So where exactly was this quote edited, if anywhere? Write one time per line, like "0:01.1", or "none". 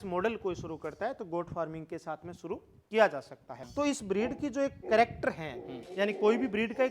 0:03.6